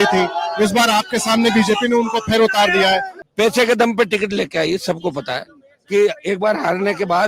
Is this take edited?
yes; 1 cut; at 3.2 s

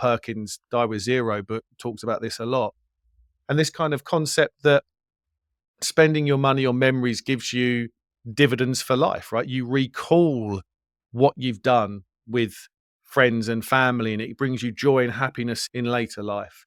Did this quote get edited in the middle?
no; 0 cuts

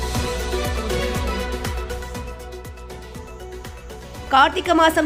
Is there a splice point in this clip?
yes; 2 cuts; at 0.7 s, 1.5 s

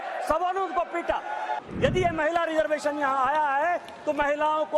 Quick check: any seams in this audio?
yes; 1 cut; at 1.6 s

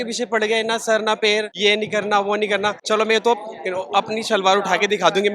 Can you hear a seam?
yes; 2 cuts; at 1.5 s, 2.8 s

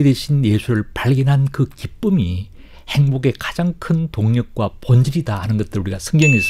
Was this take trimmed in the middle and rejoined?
no; 0 cuts

